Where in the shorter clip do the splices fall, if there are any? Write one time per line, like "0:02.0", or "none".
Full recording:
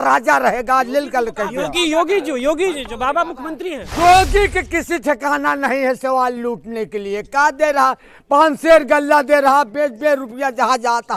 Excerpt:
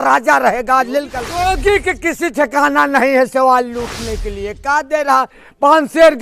0:01.2